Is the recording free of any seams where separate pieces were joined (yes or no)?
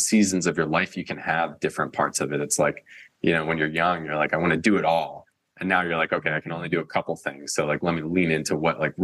yes